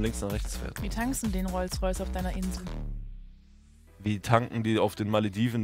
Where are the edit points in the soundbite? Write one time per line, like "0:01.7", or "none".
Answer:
none